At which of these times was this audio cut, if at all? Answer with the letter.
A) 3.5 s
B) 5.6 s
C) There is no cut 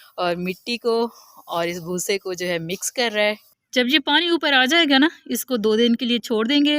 A